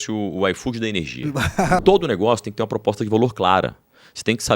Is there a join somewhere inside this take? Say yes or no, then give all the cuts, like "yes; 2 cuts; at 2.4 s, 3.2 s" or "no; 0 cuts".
yes; 1 cut; at 1.8 s